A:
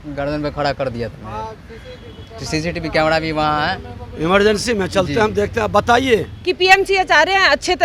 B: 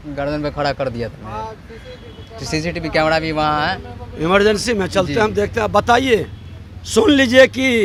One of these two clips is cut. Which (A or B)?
A